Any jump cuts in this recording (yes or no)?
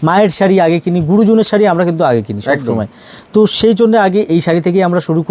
no